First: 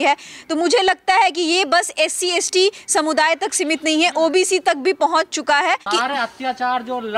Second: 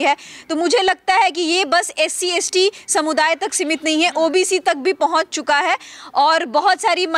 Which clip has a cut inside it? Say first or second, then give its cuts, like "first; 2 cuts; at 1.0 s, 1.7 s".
first; 1 cut; at 5.9 s